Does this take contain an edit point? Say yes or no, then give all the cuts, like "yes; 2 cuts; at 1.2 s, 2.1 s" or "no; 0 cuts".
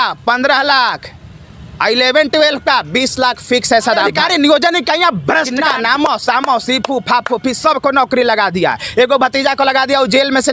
yes; 2 cuts; at 4.1 s, 5.7 s